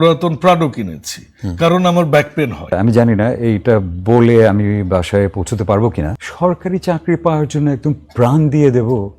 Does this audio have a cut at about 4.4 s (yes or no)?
no